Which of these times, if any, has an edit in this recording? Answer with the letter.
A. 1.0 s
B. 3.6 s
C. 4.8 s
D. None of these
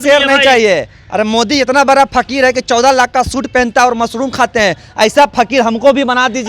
D